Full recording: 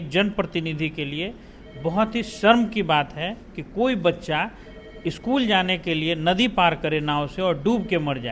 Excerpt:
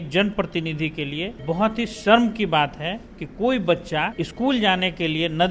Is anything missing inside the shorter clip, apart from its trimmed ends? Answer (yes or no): yes